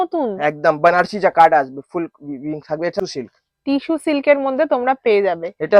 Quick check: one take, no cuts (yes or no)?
no